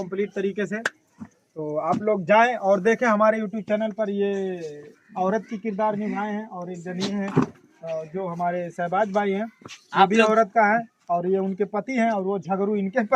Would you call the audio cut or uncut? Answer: uncut